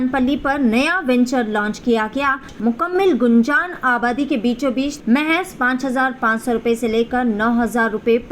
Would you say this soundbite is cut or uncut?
cut